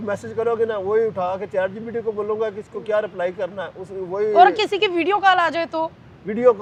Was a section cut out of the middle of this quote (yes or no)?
no